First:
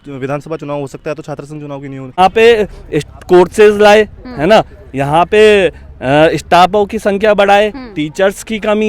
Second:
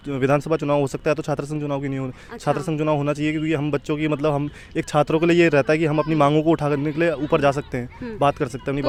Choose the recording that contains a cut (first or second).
first